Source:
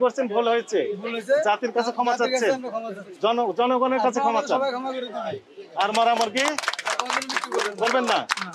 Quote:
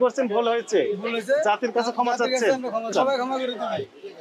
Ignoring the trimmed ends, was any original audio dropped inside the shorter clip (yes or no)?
yes